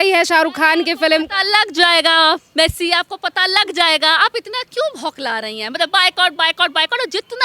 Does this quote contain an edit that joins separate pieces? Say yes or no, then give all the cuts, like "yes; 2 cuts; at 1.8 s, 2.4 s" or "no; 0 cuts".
no; 0 cuts